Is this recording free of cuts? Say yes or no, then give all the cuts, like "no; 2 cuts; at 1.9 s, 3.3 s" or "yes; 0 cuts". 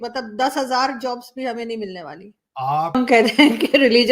no; 1 cut; at 3.0 s